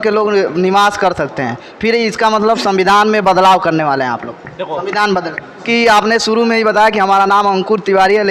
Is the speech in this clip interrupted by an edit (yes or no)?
yes